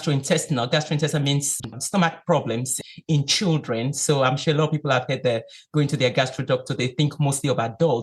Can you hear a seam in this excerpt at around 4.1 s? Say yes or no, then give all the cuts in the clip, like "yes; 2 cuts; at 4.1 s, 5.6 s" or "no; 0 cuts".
no; 2 cuts; at 1.7 s, 2.8 s